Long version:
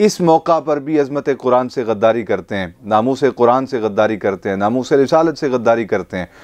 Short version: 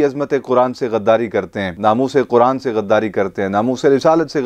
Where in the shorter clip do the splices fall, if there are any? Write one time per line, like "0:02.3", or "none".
0:01.7